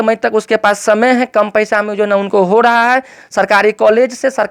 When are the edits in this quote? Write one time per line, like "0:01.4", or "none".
none